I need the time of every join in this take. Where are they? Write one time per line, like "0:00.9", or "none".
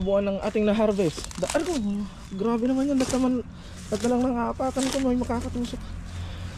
none